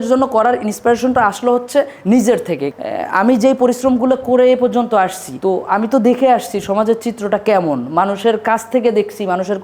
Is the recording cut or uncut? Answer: cut